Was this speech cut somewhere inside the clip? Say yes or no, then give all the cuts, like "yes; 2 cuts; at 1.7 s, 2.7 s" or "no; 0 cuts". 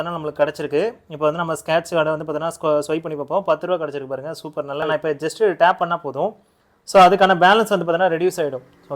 yes; 1 cut; at 4.9 s